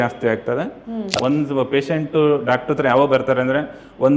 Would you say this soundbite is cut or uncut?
cut